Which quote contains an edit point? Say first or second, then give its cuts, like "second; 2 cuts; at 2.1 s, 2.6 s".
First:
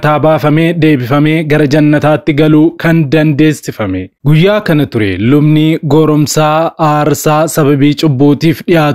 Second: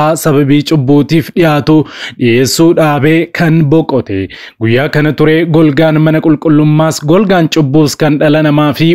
second; 1 cut; at 4.4 s